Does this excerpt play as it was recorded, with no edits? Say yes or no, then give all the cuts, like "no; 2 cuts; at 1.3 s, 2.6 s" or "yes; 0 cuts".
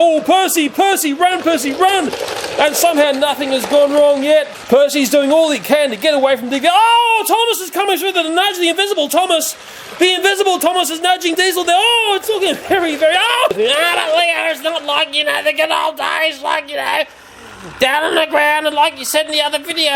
no; 2 cuts; at 4.5 s, 13.5 s